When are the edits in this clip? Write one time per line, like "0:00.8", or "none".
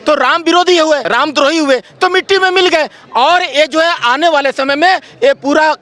0:01.1